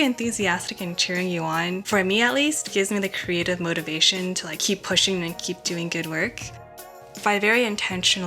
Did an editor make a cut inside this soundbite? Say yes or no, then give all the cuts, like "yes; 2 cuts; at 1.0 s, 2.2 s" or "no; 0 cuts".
yes; 1 cut; at 6.9 s